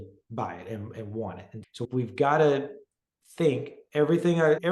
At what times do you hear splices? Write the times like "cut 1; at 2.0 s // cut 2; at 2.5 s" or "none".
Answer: none